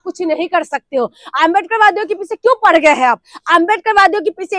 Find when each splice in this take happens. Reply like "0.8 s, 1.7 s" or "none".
none